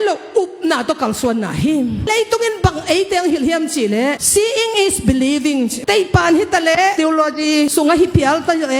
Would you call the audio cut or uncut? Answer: cut